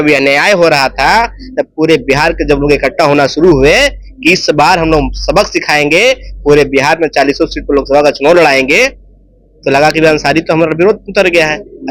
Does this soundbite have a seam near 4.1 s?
no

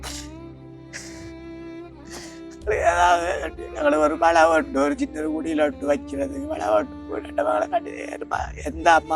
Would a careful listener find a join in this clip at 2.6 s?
yes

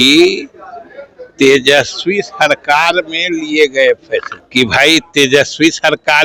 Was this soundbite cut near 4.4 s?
yes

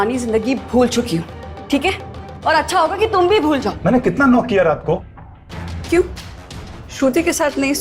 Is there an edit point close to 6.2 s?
no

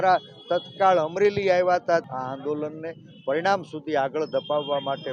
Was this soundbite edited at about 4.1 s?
no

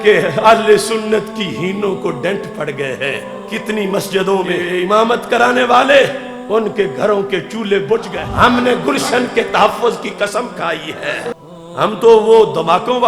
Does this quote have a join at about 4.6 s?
yes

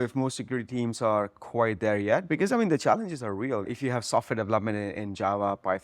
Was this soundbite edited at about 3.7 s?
yes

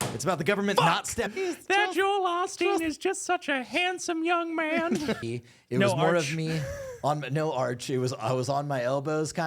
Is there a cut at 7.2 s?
no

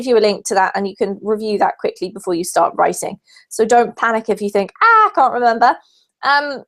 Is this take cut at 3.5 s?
yes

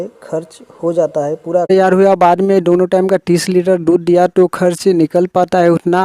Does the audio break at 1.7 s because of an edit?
yes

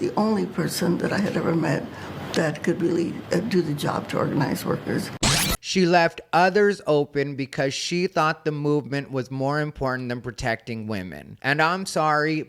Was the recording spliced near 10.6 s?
no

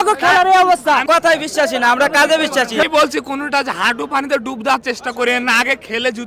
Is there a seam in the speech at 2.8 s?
yes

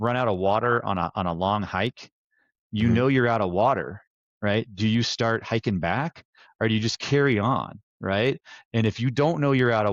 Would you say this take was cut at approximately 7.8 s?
no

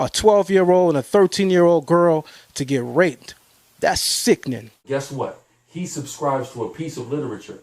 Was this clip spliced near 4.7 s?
yes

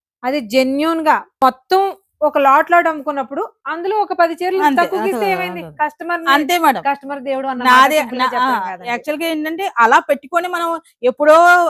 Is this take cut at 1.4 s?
yes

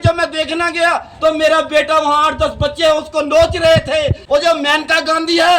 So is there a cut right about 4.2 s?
yes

